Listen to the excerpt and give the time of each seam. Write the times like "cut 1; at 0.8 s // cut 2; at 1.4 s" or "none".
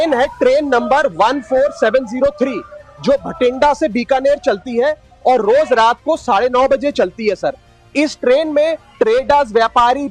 none

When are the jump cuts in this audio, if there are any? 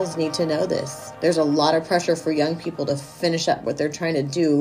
cut 1; at 1.0 s

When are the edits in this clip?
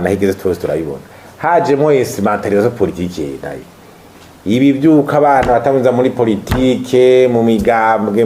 none

